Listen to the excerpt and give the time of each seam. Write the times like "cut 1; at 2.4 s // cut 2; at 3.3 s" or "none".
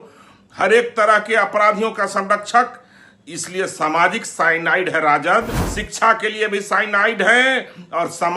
cut 1; at 5.6 s

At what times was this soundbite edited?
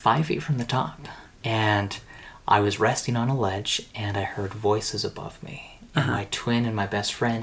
cut 1; at 1.3 s

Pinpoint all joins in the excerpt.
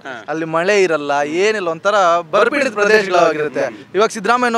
none

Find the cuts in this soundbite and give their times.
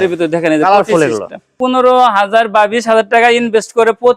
cut 1; at 1.5 s

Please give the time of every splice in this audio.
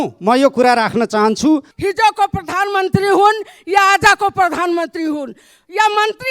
cut 1; at 1.7 s

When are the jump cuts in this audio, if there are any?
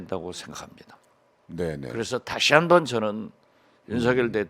cut 1; at 1.0 s

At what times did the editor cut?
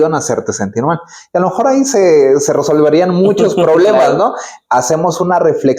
none

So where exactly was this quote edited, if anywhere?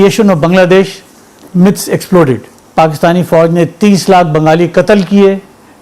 cut 1; at 2.6 s

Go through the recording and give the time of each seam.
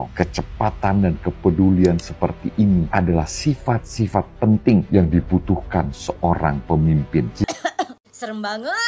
cut 1; at 7.4 s

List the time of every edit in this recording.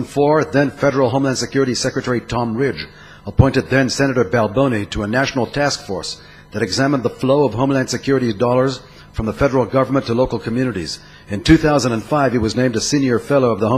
cut 1; at 2.3 s

